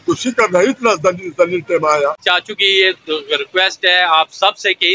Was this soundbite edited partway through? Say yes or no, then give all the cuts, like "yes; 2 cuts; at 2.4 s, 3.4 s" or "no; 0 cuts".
yes; 1 cut; at 2.2 s